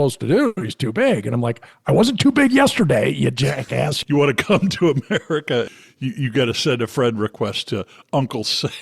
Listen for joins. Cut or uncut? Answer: cut